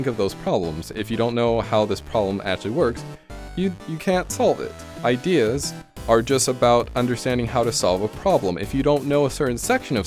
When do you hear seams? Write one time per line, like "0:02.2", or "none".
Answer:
none